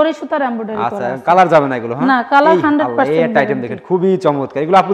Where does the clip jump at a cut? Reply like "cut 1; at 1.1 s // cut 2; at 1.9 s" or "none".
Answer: none